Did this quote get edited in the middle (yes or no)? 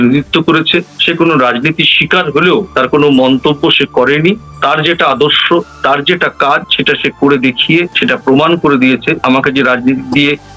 yes